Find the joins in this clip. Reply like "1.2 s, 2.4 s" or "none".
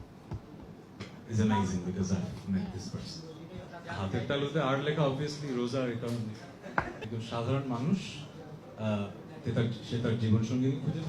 3.8 s, 7.0 s